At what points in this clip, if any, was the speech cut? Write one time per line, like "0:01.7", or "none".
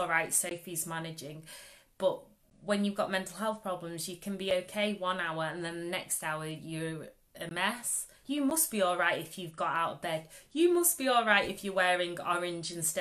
0:08.1